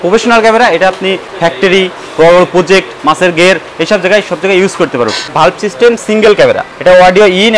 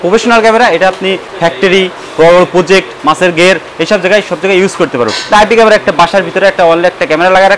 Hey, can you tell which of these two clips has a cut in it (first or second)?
first